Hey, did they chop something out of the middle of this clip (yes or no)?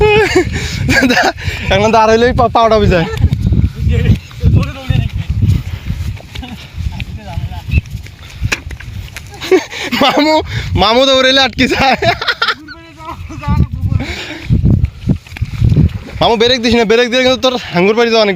no